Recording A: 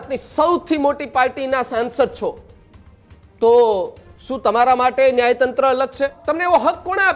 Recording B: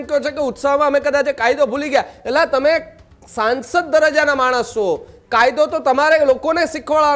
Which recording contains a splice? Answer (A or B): A